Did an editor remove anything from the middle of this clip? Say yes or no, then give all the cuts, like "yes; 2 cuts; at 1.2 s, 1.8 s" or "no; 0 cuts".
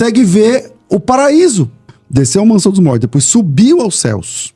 yes; 1 cut; at 2.0 s